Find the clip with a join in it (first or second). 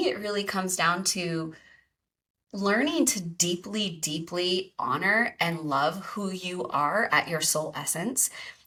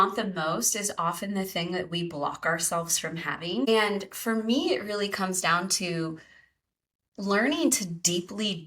second